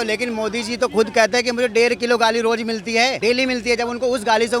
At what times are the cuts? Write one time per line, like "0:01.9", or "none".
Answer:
0:03.2